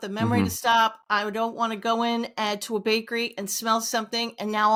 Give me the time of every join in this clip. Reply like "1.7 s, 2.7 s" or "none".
none